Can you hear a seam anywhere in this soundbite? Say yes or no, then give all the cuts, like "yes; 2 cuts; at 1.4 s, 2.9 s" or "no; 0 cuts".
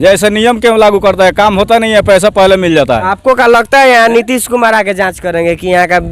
no; 0 cuts